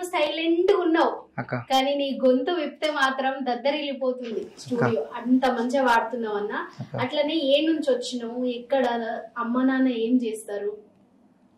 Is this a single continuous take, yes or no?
yes